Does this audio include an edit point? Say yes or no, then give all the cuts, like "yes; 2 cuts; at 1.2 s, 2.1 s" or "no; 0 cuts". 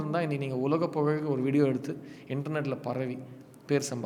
no; 0 cuts